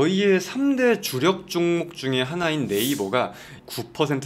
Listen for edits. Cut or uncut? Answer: uncut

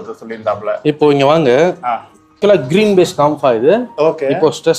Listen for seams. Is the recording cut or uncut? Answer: cut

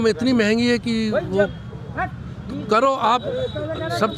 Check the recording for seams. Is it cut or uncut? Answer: uncut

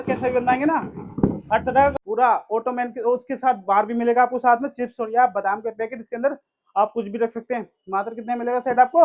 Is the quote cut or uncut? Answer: cut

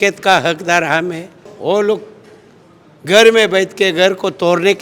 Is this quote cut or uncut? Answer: cut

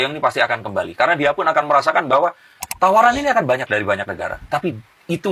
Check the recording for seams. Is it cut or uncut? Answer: uncut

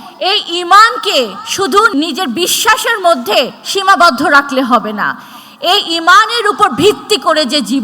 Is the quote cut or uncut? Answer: uncut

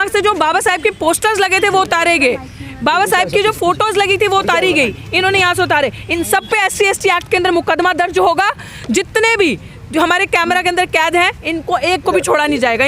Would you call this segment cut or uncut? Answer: uncut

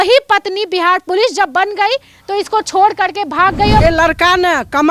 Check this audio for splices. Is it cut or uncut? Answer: cut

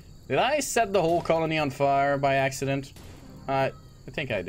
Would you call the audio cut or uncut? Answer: uncut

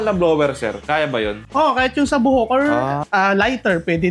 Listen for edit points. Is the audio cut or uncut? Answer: uncut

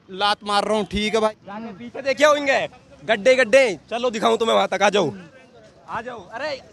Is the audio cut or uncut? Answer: cut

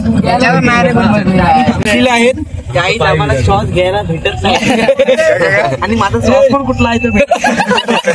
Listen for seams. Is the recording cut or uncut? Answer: cut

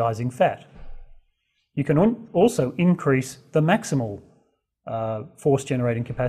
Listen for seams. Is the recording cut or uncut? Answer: uncut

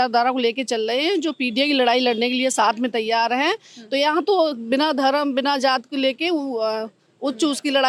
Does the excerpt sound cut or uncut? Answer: uncut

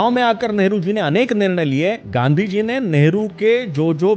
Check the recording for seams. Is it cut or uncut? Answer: cut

